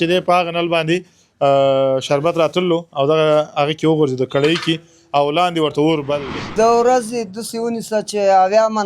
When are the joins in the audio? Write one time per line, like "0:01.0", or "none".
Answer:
0:06.5